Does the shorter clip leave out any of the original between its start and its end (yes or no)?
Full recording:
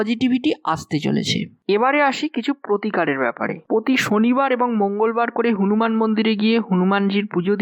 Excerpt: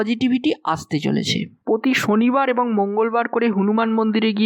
yes